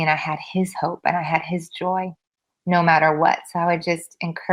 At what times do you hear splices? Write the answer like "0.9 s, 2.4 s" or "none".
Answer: none